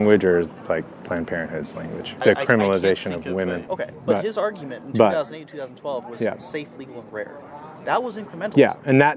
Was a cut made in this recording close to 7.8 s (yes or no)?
no